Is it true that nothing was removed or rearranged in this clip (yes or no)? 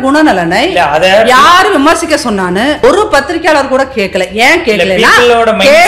no